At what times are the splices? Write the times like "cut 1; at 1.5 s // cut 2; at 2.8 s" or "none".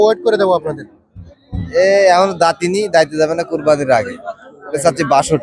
cut 1; at 1.2 s